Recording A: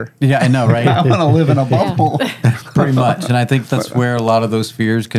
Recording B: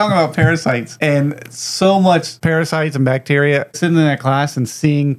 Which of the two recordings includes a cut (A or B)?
B